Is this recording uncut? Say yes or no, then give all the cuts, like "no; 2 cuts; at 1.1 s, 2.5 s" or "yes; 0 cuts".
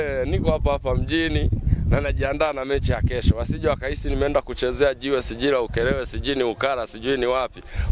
yes; 0 cuts